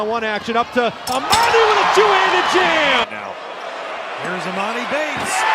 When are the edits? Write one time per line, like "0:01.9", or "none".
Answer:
0:03.0